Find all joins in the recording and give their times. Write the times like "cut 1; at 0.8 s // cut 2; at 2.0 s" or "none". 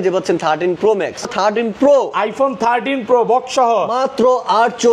cut 1; at 1.2 s